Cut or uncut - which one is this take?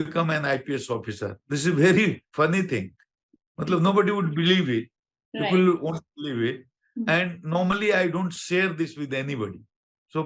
uncut